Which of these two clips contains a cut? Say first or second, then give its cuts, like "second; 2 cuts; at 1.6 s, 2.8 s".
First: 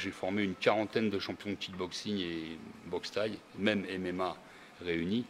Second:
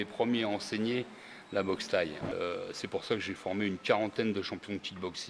second; 1 cut; at 2.3 s